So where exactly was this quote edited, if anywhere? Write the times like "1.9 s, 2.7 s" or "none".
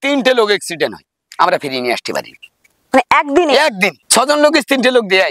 none